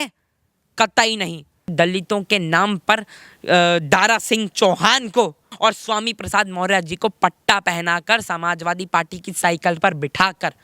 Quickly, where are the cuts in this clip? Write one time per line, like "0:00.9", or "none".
0:01.7
0:05.5